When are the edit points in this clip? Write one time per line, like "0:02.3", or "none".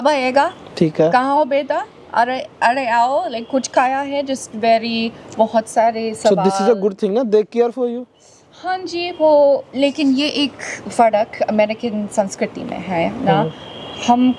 none